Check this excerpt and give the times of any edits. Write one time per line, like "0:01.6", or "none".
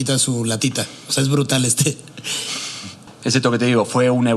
0:03.1